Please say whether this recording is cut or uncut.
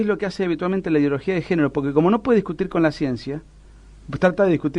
uncut